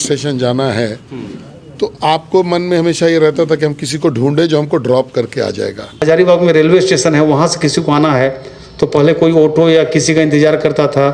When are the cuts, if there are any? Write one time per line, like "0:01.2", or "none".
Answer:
0:06.0